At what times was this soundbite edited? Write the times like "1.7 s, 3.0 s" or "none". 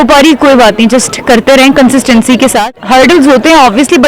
2.7 s

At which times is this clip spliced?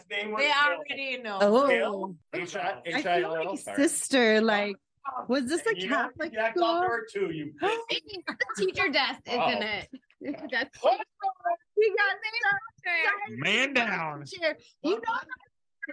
2.2 s, 11.7 s

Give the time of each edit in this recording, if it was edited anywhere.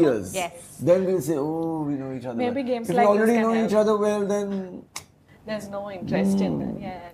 none

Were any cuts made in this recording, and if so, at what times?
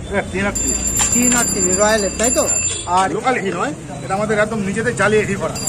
3.1 s

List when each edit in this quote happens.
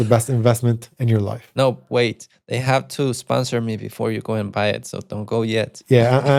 none

